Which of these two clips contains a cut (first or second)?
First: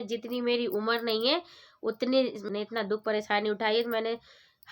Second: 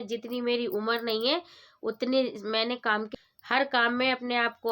second